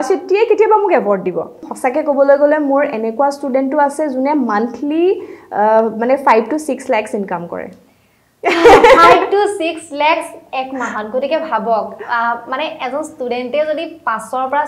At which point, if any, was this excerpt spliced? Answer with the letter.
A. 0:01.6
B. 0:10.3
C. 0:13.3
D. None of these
A